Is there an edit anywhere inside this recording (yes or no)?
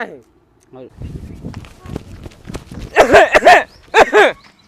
yes